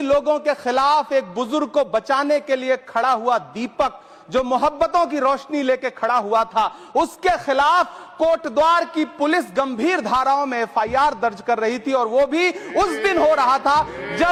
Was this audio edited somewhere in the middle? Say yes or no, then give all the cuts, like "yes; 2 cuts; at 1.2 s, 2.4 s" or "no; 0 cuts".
no; 0 cuts